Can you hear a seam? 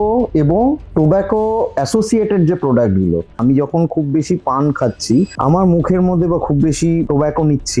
yes; 1 cut; at 3.4 s

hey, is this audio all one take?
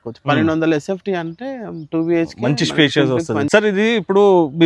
no; 1 cut; at 3.5 s

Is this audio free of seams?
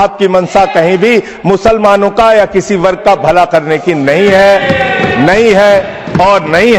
yes; 0 cuts

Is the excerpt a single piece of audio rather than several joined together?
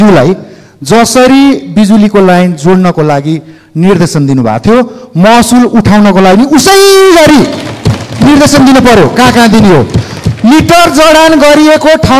yes; 0 cuts

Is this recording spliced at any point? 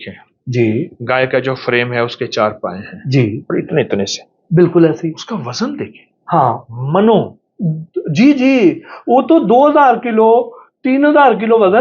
no; 0 cuts

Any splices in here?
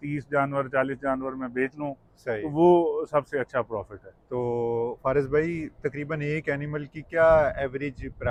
no; 0 cuts

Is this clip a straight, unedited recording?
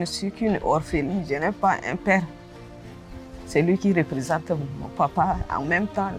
yes; 0 cuts

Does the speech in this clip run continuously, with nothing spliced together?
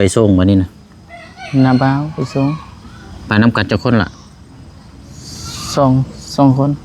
yes; 0 cuts

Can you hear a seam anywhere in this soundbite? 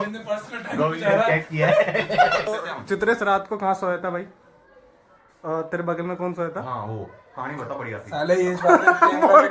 yes; 1 cut; at 2.4 s

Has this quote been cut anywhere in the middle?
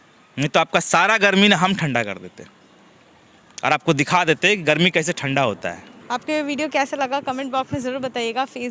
no; 0 cuts

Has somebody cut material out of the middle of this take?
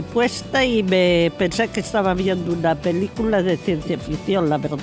no; 0 cuts

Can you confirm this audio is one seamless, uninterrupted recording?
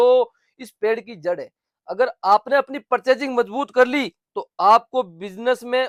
yes; 0 cuts

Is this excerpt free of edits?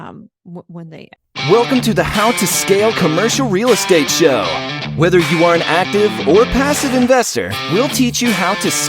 no; 1 cut; at 1.3 s

